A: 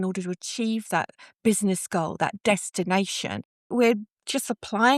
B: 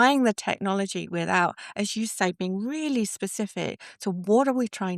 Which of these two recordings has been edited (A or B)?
A